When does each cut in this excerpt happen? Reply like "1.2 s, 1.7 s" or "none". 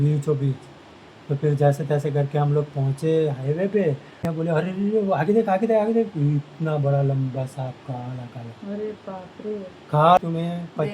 4.1 s, 10.2 s